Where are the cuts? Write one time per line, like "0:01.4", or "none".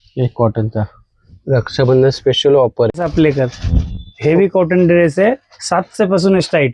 0:02.9